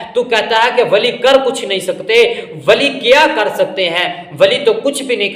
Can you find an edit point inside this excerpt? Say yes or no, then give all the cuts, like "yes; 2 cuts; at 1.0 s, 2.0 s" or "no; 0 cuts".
no; 0 cuts